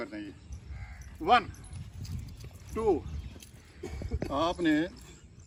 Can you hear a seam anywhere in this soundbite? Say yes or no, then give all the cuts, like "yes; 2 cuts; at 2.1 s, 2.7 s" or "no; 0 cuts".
no; 0 cuts